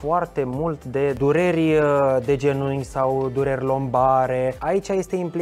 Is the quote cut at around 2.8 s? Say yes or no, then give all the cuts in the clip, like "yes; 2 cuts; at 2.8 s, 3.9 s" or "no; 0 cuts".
no; 2 cuts; at 1.2 s, 4.6 s